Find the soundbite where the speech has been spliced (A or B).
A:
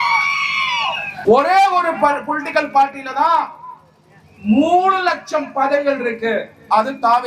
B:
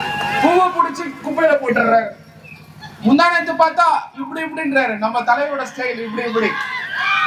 A